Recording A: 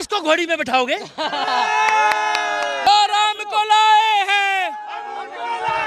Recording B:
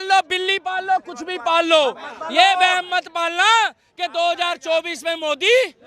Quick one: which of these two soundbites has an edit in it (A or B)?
A